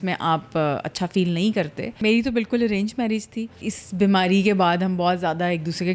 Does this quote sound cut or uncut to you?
cut